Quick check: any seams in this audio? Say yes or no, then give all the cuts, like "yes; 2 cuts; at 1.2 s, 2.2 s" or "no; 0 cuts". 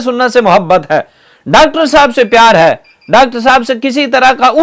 no; 0 cuts